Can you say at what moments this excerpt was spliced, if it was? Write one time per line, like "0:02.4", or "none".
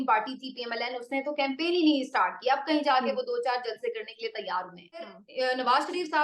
0:05.0